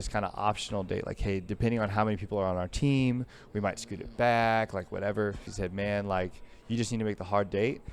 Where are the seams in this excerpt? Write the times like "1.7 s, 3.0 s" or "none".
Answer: 5.5 s